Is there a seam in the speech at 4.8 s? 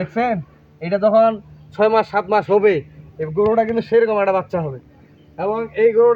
no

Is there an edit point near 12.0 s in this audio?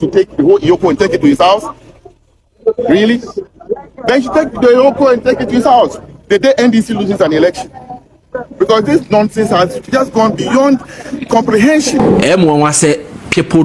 yes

